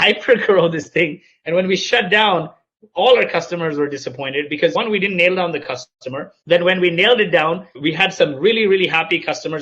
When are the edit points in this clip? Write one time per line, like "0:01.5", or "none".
0:04.7
0:06.3
0:07.7